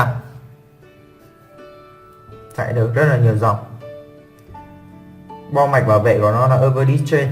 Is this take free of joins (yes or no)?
no